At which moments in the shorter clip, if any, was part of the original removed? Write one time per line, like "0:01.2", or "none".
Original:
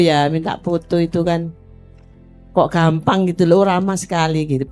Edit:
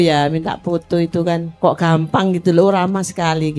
0:01.5